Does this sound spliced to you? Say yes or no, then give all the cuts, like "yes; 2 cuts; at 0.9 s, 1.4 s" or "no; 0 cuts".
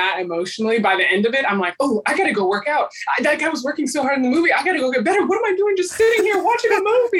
no; 0 cuts